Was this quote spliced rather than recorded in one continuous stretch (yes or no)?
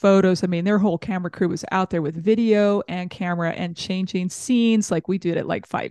no